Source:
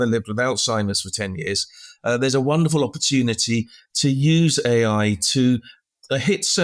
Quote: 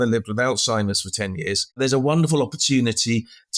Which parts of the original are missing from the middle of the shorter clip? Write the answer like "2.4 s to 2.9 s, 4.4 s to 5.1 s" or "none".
1.8 s to 2.2 s